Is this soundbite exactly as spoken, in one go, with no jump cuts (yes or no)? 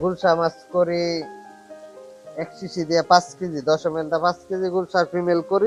yes